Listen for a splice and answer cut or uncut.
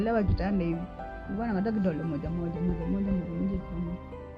uncut